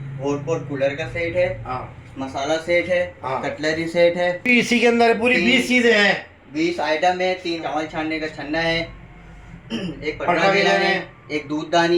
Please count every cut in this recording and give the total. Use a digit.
2